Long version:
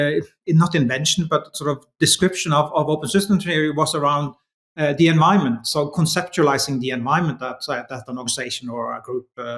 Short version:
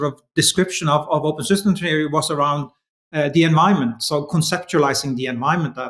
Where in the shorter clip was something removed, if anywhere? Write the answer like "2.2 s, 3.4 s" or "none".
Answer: none